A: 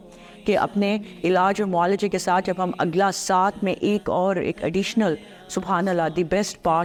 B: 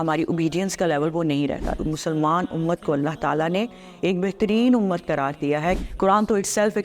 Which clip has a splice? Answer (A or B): B